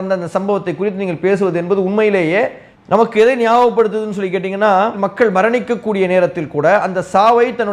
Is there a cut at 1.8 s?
no; 1 cut; at 4.9 s

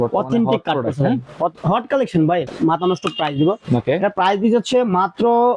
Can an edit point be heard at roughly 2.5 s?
yes; 1 cut; at 2.5 s

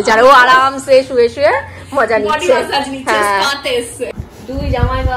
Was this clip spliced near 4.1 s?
yes; 1 cut; at 4.1 s

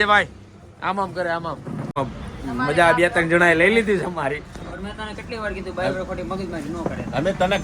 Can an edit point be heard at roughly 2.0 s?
yes; 1 cut; at 2.0 s

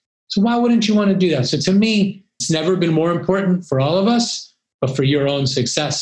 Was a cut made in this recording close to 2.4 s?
yes; 1 cut; at 2.4 s

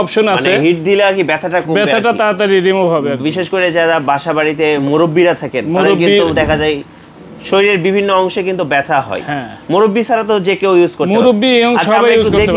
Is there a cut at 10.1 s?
no; 0 cuts

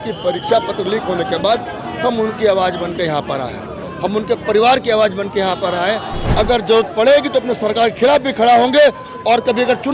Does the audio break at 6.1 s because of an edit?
yes; 1 cut; at 6.1 s

